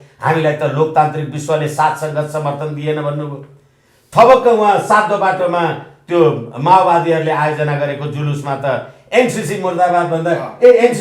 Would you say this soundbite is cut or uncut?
uncut